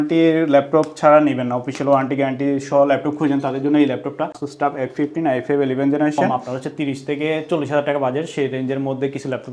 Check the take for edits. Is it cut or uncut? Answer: cut